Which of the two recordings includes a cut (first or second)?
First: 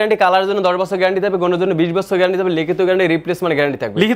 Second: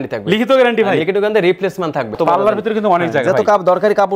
second